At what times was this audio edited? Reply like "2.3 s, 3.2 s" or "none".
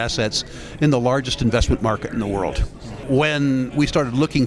3.0 s